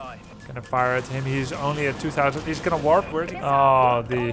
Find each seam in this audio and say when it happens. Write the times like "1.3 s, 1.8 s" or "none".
3.2 s